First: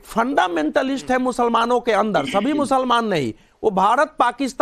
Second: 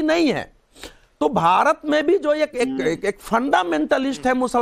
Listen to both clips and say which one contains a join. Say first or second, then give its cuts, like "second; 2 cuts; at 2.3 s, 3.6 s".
second; 1 cut; at 2.2 s